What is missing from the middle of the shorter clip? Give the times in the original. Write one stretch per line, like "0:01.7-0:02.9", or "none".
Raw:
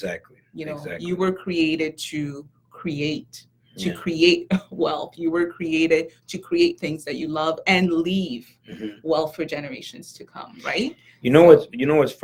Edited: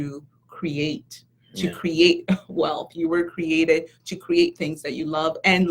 none